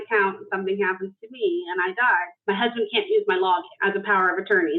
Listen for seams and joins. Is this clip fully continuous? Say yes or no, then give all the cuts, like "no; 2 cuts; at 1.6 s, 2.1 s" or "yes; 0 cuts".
no; 2 cuts; at 2.3 s, 3.7 s